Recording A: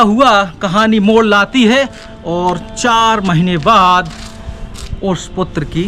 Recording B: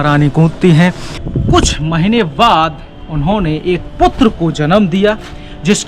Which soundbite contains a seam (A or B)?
B